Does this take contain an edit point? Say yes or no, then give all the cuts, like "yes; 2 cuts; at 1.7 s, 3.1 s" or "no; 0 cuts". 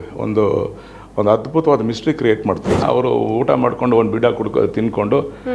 yes; 1 cut; at 2.8 s